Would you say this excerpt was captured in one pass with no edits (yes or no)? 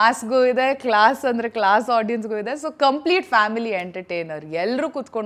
yes